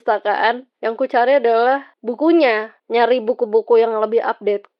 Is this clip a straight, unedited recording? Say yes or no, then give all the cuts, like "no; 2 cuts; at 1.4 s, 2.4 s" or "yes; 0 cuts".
yes; 0 cuts